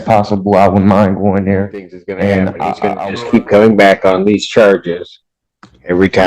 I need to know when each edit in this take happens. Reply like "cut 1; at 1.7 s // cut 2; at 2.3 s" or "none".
cut 1; at 2.8 s